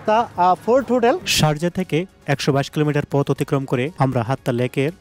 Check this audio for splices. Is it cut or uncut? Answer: cut